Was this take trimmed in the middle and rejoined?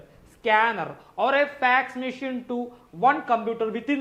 no; 0 cuts

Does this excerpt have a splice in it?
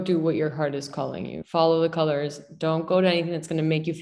no; 0 cuts

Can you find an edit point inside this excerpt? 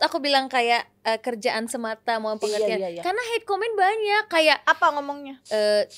no; 0 cuts

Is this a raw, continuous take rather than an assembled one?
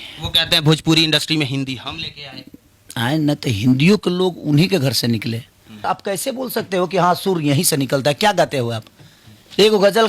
no; 1 cut; at 5.8 s

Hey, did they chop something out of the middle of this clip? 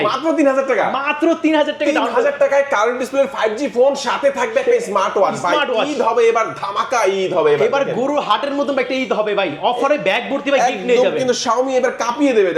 no; 0 cuts

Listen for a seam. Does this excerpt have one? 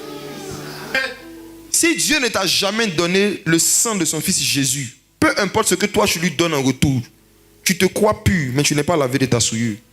yes; 1 cut; at 0.9 s

